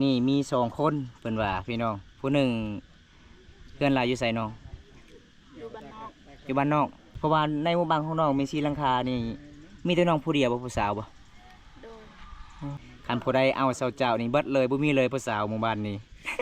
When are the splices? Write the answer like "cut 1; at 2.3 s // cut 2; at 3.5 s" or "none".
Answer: cut 1; at 7.0 s // cut 2; at 12.4 s